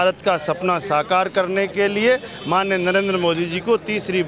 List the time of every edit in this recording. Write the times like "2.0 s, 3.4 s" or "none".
none

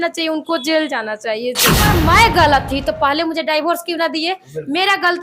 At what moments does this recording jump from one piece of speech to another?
1.9 s

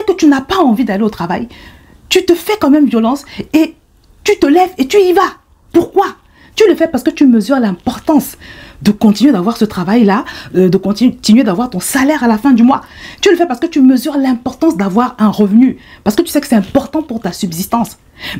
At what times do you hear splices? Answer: none

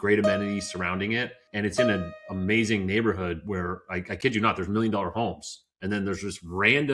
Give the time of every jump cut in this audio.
1.6 s

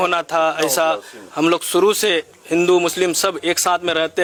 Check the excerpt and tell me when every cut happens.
none

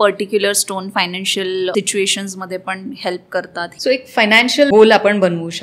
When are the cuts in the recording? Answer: 1.7 s, 3.7 s, 4.7 s

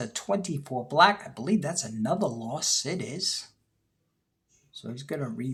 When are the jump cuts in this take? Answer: none

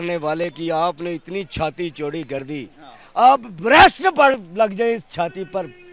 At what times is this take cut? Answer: none

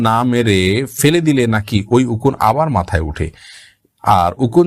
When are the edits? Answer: none

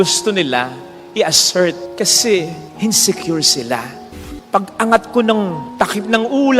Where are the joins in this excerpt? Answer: 4.2 s

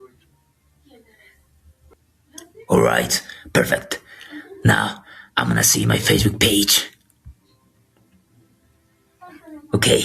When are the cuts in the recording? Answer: 1.7 s

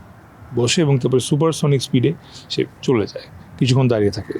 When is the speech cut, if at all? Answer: none

